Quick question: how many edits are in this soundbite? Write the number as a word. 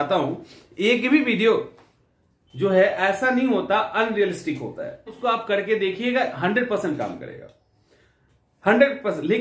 one